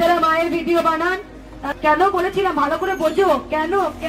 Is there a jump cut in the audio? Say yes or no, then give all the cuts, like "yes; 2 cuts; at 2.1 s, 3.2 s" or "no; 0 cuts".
yes; 1 cut; at 1.7 s